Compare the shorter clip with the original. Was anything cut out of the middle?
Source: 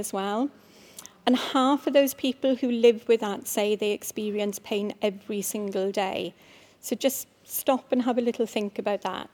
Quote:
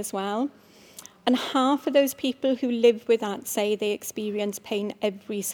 no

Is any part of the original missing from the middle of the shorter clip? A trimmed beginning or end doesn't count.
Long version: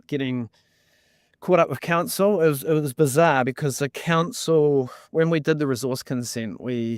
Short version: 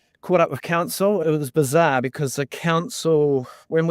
yes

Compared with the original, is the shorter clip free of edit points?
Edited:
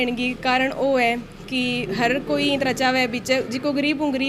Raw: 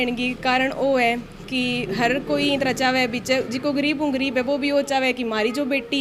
yes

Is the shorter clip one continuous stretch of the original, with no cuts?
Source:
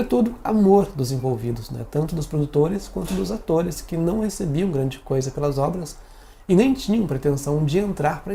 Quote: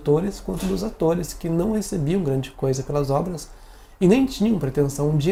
yes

